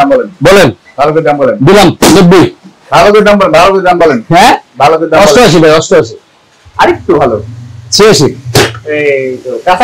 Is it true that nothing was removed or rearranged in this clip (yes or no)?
yes